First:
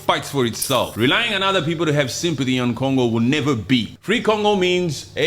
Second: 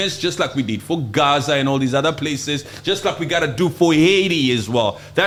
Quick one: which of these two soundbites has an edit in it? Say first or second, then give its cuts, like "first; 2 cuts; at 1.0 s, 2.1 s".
first; 2 cuts; at 0.9 s, 3.9 s